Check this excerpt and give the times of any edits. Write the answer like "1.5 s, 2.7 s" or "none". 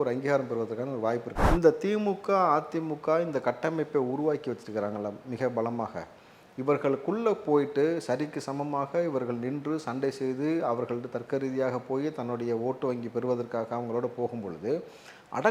1.4 s

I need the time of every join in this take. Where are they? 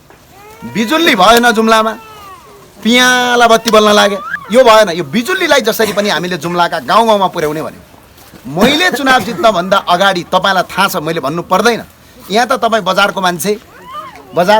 4.3 s

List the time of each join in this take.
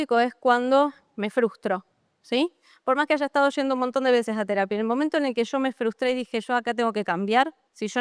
none

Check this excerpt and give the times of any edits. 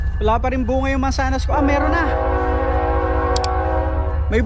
none

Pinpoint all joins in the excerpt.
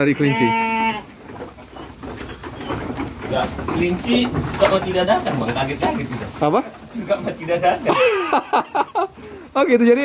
none

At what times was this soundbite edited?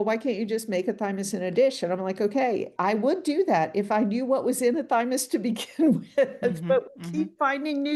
none

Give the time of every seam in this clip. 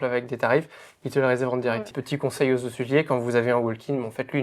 1.8 s

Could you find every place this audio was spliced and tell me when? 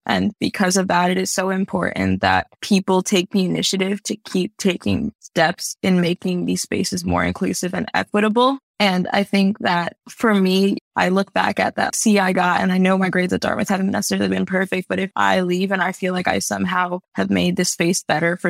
none

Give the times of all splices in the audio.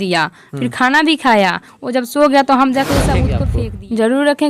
3.4 s

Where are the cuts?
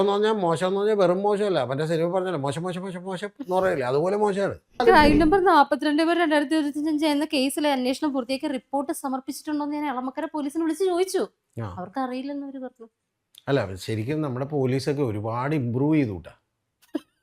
4.8 s

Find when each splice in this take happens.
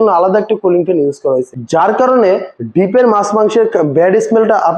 1.6 s, 2.6 s

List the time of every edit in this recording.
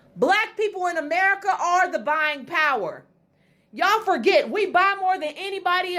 none

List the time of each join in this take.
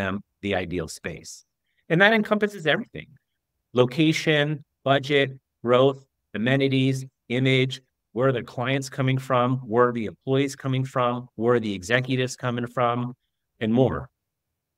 none

